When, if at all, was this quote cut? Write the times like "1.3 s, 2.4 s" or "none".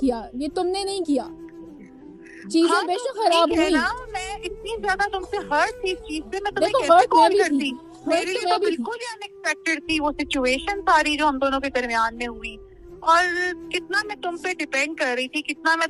none